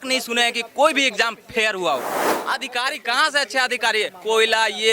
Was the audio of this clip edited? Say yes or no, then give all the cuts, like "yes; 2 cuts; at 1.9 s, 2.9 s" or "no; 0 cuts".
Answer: yes; 1 cut; at 2.3 s